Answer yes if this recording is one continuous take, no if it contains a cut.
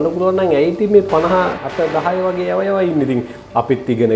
no